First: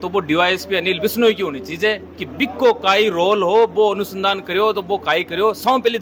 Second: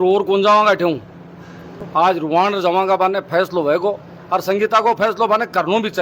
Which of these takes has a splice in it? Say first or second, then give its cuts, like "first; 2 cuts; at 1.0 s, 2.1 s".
second; 1 cut; at 1.8 s